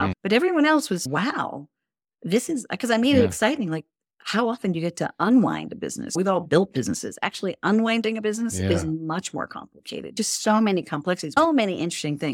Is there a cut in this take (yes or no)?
yes